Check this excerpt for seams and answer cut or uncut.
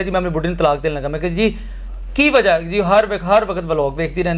uncut